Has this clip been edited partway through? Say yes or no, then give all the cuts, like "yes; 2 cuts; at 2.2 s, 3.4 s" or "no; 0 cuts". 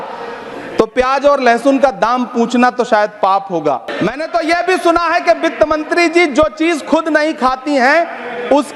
yes; 1 cut; at 3.9 s